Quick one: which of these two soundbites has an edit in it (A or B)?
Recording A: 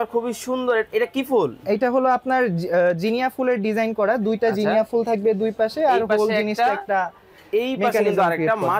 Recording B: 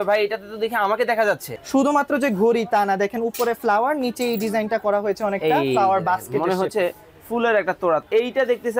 B